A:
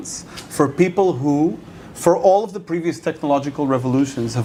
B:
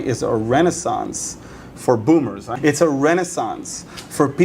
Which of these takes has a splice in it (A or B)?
B